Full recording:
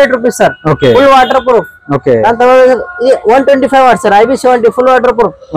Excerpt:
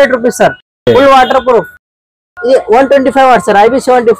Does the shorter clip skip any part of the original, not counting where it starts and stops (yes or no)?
yes